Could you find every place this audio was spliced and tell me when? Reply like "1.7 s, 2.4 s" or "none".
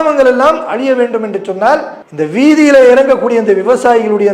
2.0 s